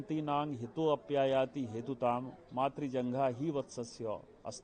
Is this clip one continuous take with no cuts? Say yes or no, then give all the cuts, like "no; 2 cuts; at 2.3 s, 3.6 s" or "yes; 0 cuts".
yes; 0 cuts